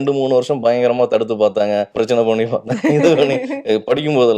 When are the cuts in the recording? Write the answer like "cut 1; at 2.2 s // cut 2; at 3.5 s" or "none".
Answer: cut 1; at 1.9 s